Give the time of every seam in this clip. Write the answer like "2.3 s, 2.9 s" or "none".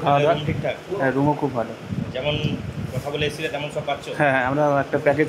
none